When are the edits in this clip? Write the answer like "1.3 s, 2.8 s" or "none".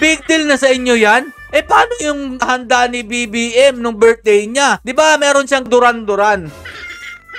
none

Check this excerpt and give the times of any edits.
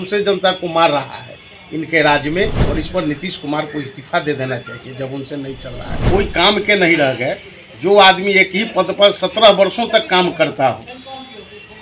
2.6 s, 6.0 s

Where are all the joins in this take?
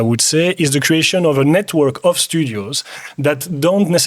none

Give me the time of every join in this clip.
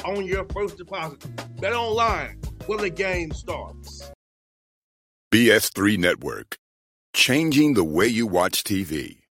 4.1 s

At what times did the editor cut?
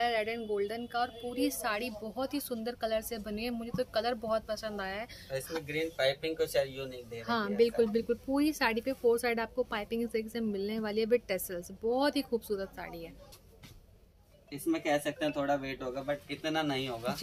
13.4 s

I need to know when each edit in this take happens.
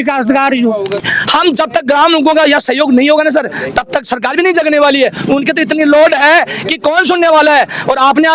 1.0 s

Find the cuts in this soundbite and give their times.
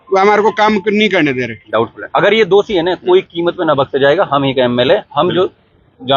1.5 s

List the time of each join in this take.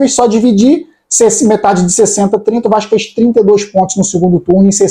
none

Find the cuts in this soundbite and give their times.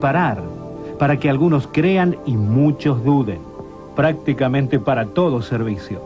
3.1 s

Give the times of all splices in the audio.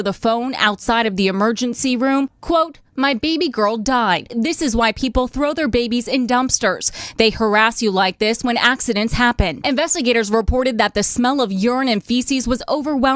4.3 s, 9.6 s

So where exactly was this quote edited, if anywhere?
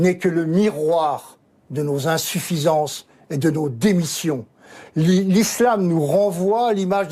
none

